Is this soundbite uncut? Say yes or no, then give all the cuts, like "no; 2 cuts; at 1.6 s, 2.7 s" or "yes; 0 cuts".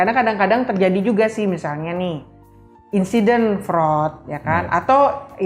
yes; 0 cuts